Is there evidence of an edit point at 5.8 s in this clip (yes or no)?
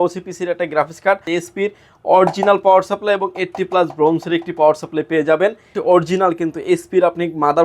yes